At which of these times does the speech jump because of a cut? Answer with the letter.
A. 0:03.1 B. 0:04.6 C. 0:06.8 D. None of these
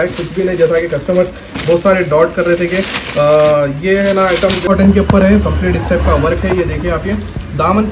B